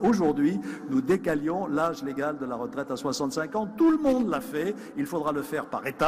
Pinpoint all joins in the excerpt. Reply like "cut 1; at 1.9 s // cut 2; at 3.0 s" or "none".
cut 1; at 1.7 s